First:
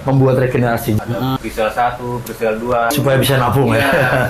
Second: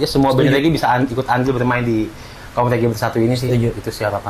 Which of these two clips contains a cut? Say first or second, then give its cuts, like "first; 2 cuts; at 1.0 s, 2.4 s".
first; 2 cuts; at 1.0 s, 2.9 s